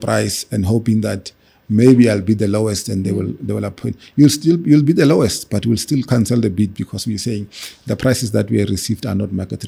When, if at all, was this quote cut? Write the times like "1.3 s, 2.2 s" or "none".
none

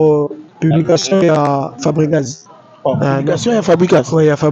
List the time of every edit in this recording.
none

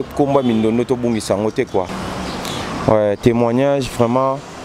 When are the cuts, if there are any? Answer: 2.0 s

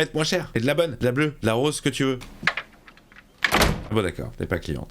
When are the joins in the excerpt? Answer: 2.3 s, 3.8 s

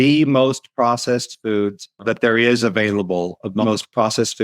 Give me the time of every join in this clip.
1.9 s, 3.6 s

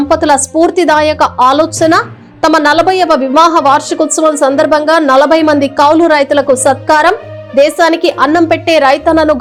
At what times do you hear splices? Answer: none

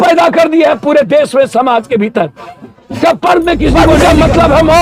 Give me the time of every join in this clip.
3.9 s

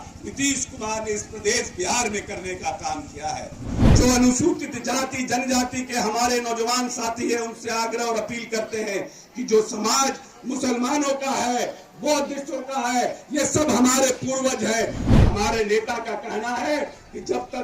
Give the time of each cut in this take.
3.8 s, 15.1 s

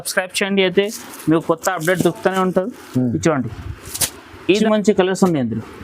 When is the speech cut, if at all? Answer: 4.5 s

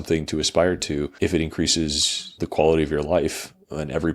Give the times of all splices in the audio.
1.1 s, 2.3 s

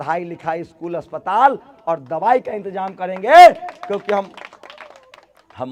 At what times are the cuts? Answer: none

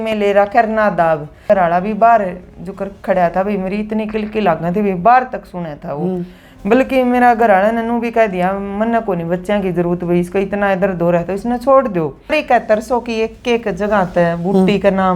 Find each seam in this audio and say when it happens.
1.4 s, 12.7 s

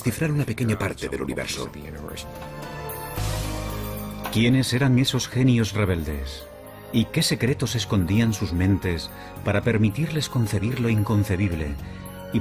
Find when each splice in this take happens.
9.6 s

